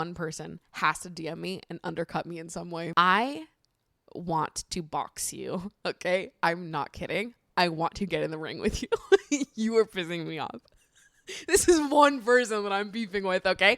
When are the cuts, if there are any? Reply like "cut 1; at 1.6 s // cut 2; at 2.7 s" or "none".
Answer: cut 1; at 2.9 s